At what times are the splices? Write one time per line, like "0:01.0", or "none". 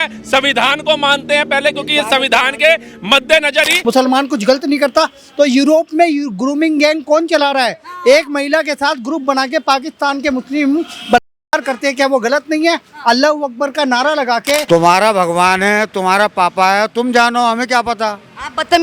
0:03.7
0:14.6